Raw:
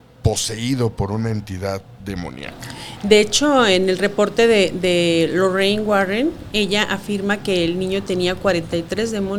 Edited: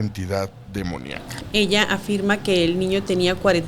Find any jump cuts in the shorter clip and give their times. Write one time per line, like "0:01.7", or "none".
0:01.4